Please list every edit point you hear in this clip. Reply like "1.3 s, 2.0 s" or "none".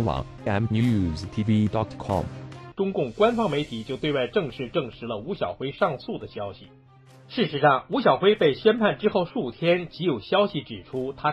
none